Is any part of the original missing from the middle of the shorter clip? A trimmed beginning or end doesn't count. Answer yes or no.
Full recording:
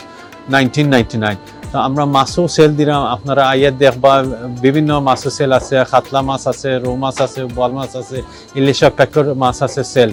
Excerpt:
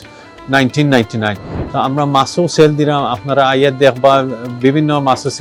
no